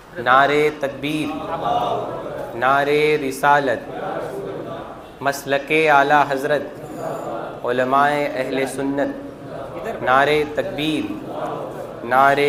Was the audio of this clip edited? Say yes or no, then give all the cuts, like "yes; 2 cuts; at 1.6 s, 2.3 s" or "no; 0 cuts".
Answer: no; 0 cuts